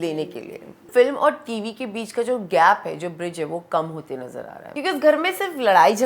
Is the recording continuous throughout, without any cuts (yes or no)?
no